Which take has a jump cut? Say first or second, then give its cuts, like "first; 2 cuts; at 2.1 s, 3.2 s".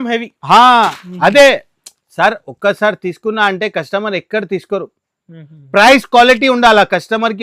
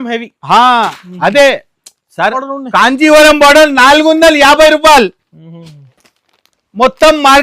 second; 1 cut; at 2.5 s